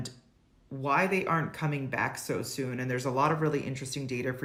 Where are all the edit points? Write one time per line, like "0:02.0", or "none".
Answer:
none